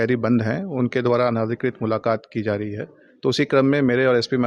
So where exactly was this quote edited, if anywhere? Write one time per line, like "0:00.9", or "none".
none